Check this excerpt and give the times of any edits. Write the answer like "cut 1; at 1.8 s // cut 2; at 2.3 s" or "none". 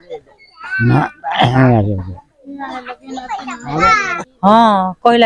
cut 1; at 4.1 s